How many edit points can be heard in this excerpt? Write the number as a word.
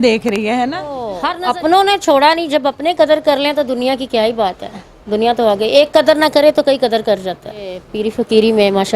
two